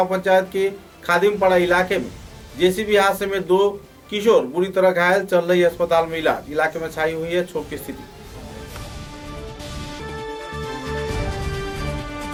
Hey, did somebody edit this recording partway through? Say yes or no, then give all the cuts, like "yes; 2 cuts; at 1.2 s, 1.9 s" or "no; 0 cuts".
no; 0 cuts